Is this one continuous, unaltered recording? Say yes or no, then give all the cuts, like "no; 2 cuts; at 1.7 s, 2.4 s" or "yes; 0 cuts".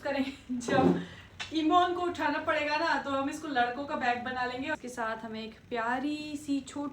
no; 1 cut; at 4.8 s